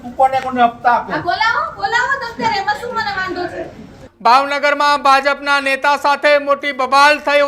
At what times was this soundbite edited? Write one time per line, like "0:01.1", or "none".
0:04.0